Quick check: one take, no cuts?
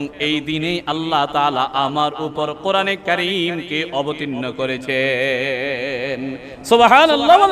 yes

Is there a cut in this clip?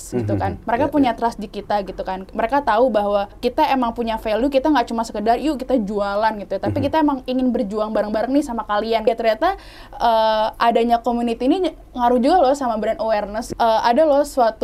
yes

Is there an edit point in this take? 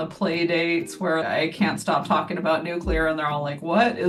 no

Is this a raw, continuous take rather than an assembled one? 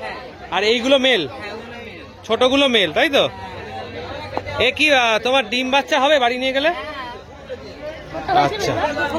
yes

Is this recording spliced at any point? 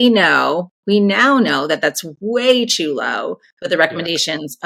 no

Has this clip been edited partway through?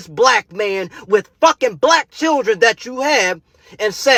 no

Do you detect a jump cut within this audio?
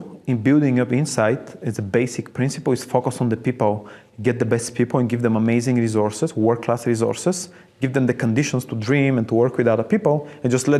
no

